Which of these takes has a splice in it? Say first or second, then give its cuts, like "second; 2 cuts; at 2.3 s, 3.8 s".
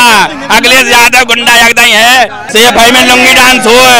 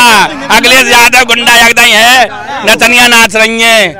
first; 1 cut; at 2.4 s